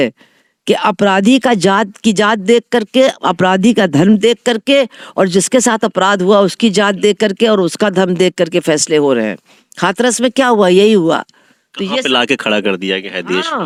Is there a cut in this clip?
no; 0 cuts

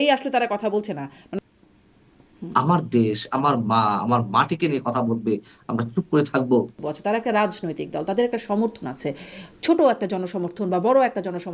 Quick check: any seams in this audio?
yes; 2 cuts; at 1.2 s, 6.8 s

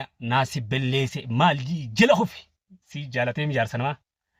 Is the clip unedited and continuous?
yes; 0 cuts

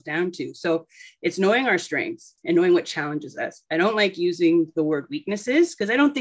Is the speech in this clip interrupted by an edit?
no; 0 cuts

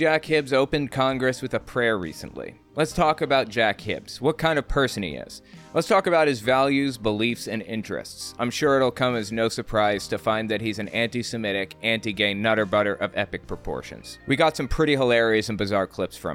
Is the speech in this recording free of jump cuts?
yes; 0 cuts

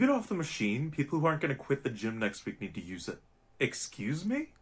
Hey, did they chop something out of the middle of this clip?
yes; 2 cuts; at 1.1 s, 3.4 s

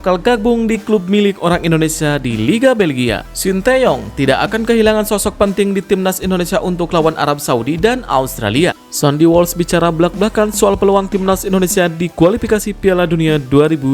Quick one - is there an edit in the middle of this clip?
yes; 2 cuts; at 3.3 s, 8.9 s

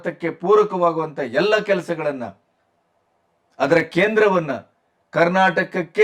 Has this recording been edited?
no; 0 cuts

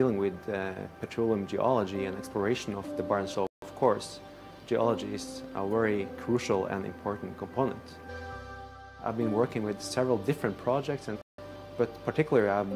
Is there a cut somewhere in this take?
yes; 3 cuts; at 3.4 s, 8.1 s, 11.2 s

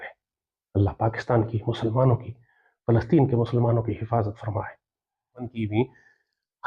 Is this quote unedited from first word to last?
no; 1 cut; at 5.4 s

